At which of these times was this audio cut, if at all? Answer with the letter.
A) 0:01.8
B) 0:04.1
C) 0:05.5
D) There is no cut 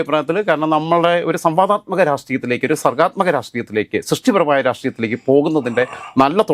D